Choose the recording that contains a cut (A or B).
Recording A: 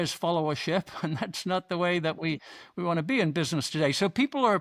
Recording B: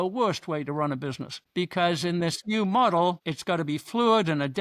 B